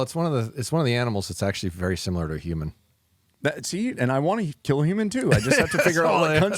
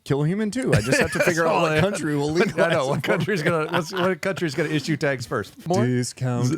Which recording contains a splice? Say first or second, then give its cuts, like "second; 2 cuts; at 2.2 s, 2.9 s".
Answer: second; 1 cut; at 5.6 s